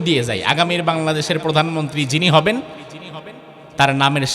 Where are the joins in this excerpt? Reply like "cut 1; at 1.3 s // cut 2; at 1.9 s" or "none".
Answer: none